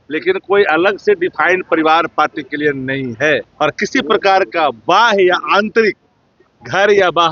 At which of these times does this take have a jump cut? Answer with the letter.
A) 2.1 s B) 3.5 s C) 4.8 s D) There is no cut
B